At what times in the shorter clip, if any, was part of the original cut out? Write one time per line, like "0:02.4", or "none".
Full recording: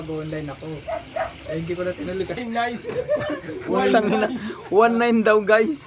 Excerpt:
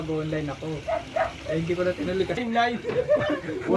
none